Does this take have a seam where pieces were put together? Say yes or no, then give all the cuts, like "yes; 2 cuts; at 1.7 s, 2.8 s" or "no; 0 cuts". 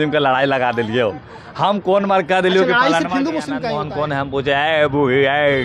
yes; 1 cut; at 3.6 s